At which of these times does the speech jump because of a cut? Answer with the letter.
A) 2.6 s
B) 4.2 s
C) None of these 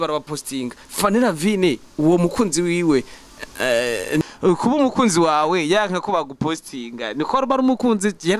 B